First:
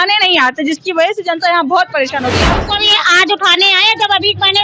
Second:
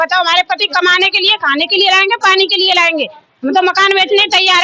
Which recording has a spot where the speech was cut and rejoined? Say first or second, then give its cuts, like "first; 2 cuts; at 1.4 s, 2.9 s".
first; 1 cut; at 2.5 s